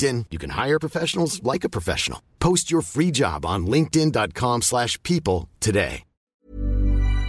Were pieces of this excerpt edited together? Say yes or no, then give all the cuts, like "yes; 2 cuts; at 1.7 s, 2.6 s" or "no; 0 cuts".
yes; 1 cut; at 6.3 s